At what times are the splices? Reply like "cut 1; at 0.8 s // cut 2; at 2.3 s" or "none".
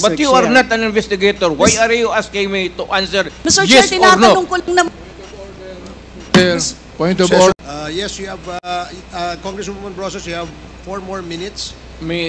cut 1; at 7.6 s

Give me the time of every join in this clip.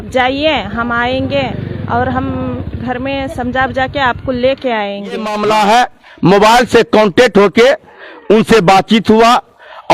cut 1; at 5.3 s

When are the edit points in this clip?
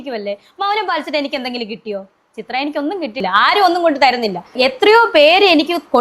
none

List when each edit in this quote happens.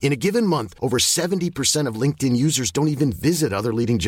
none

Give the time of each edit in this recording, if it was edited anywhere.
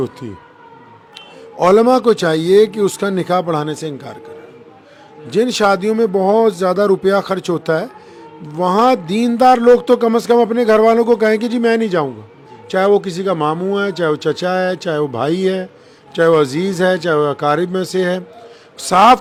none

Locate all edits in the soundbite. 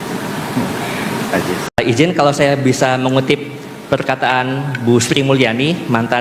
cut 1; at 1.7 s

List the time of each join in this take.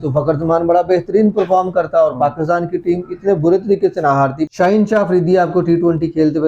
cut 1; at 4.5 s

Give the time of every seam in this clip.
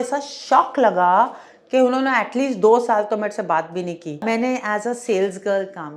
cut 1; at 4.2 s

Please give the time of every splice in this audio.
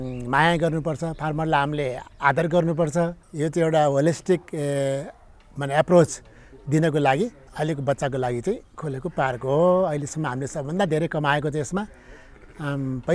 none

